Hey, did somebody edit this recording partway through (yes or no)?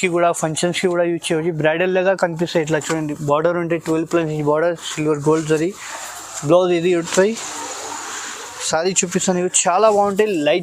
no